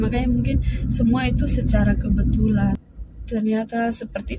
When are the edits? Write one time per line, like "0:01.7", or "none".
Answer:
0:02.8